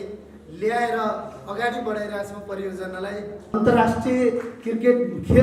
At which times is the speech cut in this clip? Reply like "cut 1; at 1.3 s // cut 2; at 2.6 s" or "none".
cut 1; at 3.5 s